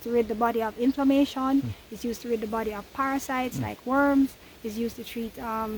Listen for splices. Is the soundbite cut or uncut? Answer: uncut